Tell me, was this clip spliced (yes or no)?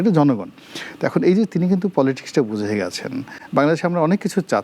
yes